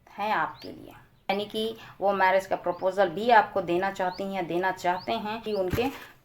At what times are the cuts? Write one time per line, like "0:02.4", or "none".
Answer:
0:01.3
0:05.4